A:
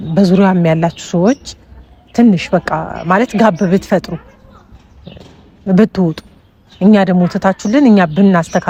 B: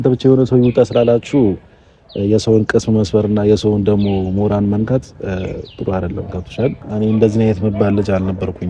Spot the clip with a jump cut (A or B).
B